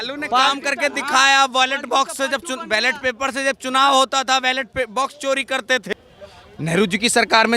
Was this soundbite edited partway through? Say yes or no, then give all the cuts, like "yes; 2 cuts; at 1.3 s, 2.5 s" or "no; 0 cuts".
yes; 1 cut; at 5.9 s